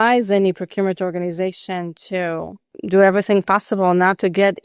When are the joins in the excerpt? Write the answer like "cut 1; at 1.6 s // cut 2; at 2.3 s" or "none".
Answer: cut 1; at 2.7 s